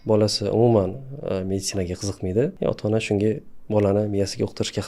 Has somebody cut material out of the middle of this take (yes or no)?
yes